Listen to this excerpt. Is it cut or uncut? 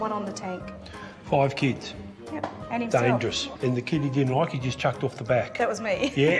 uncut